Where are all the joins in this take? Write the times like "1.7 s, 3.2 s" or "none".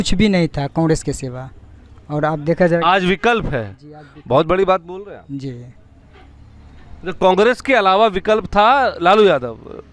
none